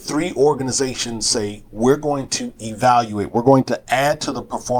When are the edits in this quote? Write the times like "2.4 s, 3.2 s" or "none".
none